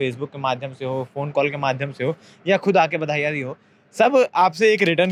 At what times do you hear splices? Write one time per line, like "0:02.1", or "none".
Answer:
none